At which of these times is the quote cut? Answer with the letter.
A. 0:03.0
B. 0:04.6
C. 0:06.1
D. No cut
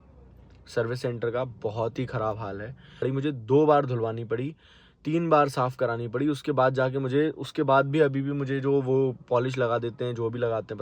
A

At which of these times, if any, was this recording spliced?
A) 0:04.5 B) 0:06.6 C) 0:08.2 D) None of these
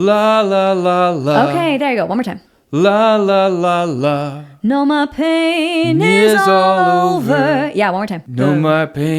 C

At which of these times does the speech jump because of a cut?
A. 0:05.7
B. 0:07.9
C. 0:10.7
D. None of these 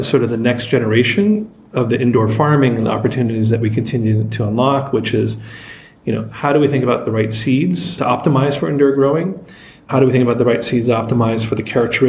B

